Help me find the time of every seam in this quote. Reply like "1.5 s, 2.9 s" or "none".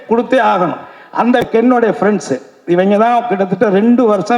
1.4 s